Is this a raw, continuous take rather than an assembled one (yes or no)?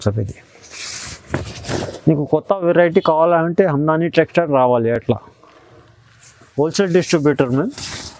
yes